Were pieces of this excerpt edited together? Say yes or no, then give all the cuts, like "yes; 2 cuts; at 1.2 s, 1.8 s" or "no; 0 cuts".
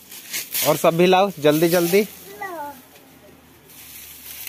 no; 0 cuts